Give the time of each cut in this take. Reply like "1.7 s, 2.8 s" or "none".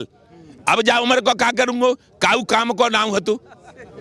none

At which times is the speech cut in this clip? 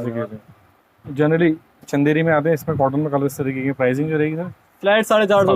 none

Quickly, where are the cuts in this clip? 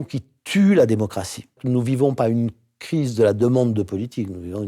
1.6 s

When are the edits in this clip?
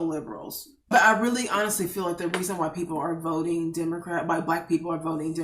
0.9 s

